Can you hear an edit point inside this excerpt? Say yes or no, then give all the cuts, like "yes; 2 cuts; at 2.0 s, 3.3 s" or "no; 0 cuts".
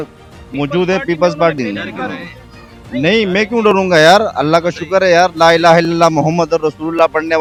no; 0 cuts